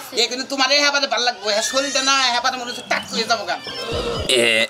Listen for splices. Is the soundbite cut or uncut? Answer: cut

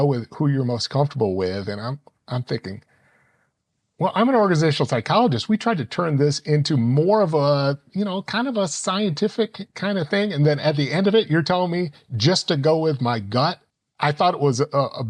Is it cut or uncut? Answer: cut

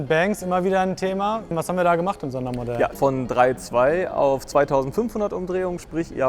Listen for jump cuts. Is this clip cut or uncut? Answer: cut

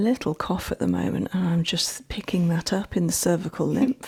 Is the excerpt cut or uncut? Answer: uncut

